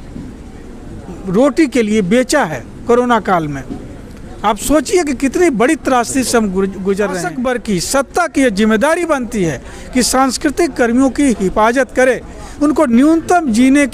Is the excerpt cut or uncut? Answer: cut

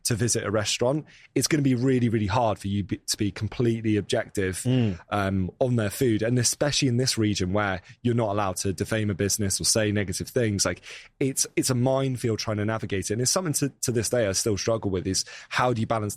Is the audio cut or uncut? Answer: uncut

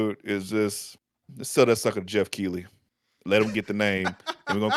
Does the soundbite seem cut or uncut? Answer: uncut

